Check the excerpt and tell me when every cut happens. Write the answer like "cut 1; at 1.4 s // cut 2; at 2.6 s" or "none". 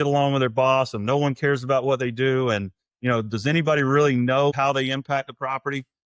cut 1; at 4.5 s